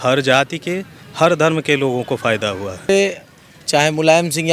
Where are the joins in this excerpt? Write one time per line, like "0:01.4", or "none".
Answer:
0:02.9